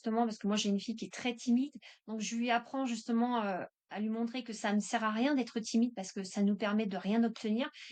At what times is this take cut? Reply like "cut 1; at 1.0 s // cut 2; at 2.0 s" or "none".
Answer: none

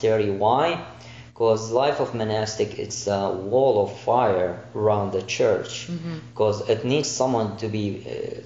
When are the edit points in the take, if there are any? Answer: none

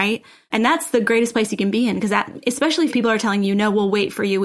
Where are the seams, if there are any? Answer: cut 1; at 2.9 s

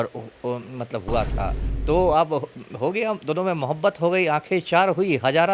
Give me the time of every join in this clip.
cut 1; at 1.7 s

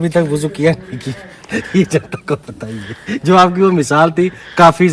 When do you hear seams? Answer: none

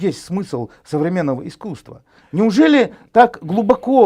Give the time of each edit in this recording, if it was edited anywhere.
none

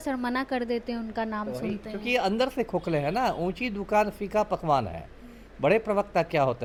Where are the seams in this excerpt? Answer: none

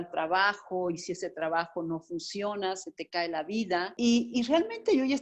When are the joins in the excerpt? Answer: cut 1; at 3.9 s

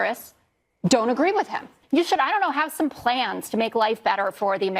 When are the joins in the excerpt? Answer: cut 1; at 1.7 s

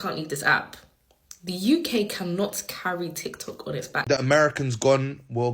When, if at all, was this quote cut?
cut 1; at 4.0 s

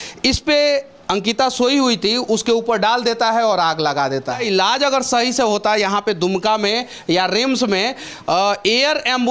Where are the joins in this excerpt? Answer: cut 1; at 4.4 s

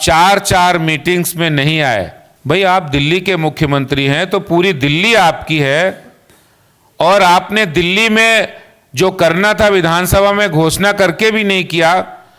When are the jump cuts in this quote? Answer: cut 1; at 2.2 s

